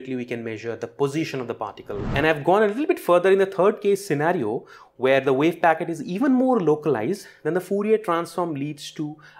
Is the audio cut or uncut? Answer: cut